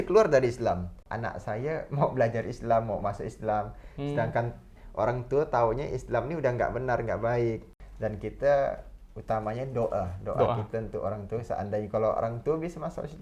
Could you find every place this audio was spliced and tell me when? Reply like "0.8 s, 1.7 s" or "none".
0.9 s, 7.7 s